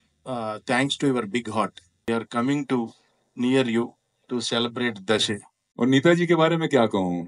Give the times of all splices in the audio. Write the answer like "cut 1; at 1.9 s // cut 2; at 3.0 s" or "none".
cut 1; at 2.1 s // cut 2; at 5.6 s